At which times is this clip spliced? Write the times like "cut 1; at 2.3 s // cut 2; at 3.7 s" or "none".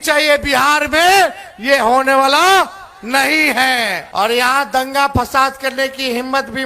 cut 1; at 4.0 s